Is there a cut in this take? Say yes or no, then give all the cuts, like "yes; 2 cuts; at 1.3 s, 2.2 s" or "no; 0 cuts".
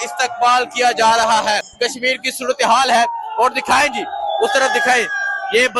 yes; 1 cut; at 1.7 s